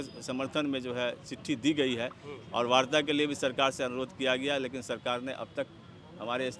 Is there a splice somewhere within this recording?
no; 0 cuts

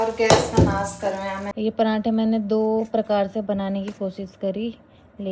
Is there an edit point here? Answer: yes; 1 cut; at 1.4 s

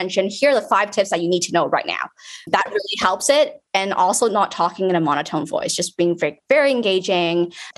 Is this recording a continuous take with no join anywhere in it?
yes; 0 cuts

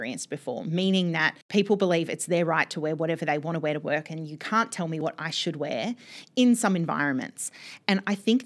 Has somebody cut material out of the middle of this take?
yes; 2 cuts; at 1.4 s, 5.0 s

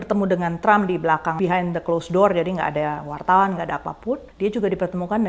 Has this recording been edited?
yes; 2 cuts; at 1.4 s, 4.3 s

